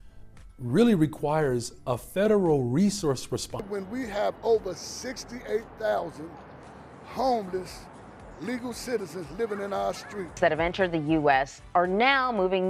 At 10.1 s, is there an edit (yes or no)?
yes